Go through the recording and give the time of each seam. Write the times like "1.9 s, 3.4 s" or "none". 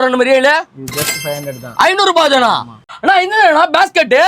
2.8 s

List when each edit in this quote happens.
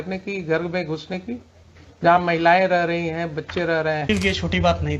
4.1 s

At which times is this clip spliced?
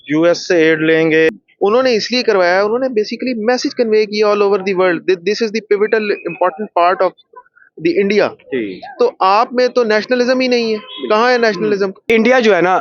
1.3 s, 12.1 s

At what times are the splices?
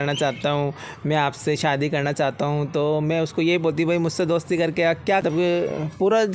5.2 s

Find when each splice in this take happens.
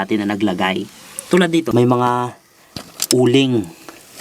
1.7 s

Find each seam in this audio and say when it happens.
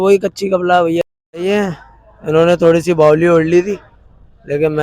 1.0 s

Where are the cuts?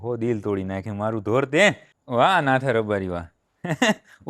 1.9 s

